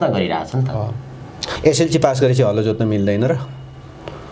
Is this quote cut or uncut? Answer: cut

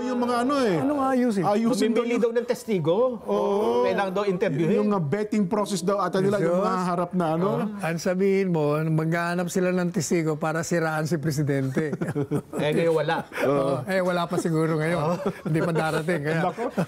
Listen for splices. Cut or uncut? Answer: uncut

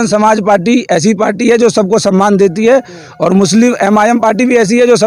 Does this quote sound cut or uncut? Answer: uncut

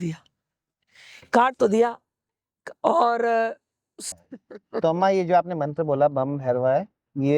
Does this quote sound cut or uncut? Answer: cut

